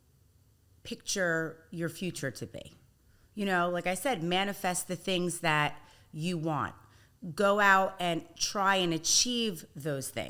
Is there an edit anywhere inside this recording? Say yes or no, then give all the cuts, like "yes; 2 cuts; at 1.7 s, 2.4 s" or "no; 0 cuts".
no; 0 cuts